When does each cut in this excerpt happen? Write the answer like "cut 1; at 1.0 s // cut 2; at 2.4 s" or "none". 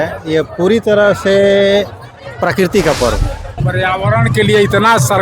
cut 1; at 3.6 s